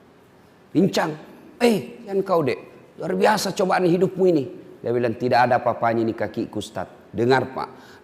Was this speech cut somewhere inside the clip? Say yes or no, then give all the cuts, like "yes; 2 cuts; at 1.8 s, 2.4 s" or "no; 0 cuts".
yes; 1 cut; at 2.0 s